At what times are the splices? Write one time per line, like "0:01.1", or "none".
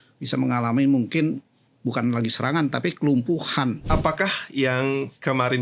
0:03.8